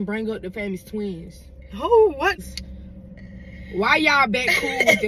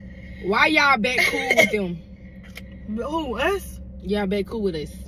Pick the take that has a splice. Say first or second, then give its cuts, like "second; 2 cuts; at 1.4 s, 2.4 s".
first; 1 cut; at 2.4 s